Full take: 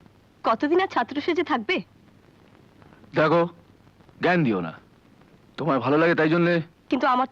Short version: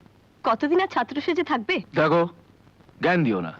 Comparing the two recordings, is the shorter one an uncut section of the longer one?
no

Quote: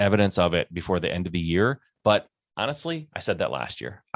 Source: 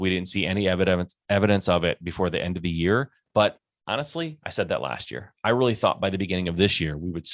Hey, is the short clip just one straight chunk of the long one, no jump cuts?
yes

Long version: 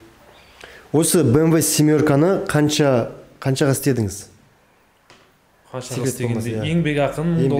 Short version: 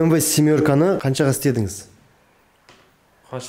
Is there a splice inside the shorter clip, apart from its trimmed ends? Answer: yes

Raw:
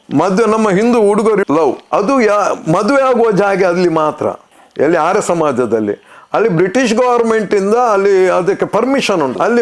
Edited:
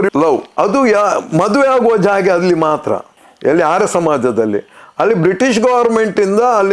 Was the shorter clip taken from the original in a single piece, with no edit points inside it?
yes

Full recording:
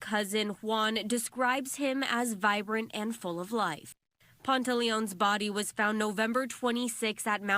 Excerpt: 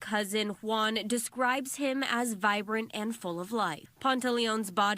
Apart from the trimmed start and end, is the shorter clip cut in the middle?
yes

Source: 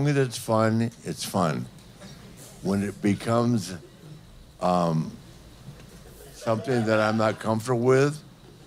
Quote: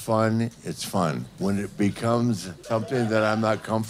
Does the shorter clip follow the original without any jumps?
no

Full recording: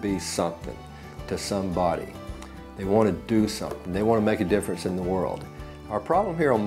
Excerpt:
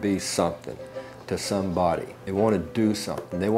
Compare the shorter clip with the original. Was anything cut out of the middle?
yes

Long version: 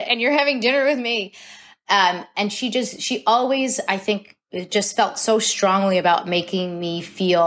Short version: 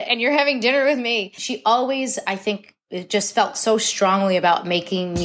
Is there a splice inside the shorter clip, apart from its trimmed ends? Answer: yes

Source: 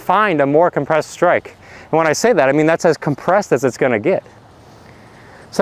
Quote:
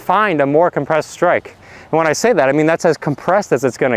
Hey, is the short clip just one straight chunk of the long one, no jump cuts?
yes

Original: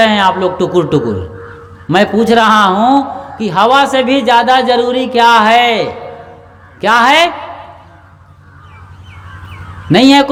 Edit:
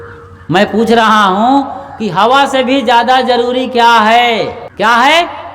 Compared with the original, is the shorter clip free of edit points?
no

